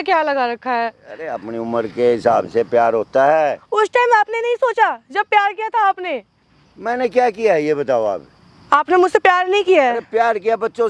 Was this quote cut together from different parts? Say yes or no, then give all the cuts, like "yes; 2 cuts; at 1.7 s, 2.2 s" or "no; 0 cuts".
no; 0 cuts